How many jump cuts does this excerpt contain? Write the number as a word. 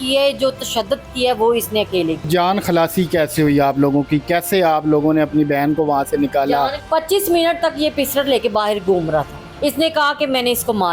three